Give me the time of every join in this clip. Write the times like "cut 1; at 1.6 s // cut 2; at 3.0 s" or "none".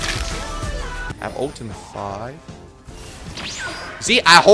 cut 1; at 1.2 s